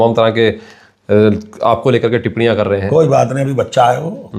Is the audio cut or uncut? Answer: uncut